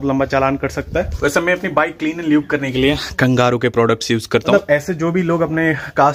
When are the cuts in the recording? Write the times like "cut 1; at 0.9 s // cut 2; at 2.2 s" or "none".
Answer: cut 1; at 1.1 s // cut 2; at 4.5 s